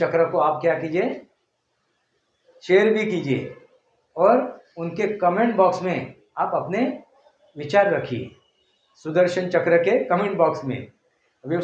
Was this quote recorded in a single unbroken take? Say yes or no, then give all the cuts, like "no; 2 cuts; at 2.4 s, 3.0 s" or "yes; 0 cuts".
yes; 0 cuts